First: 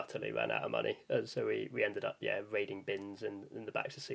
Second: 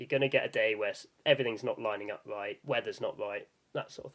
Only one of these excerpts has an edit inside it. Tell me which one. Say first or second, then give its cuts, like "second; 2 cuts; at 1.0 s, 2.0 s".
second; 1 cut; at 2.6 s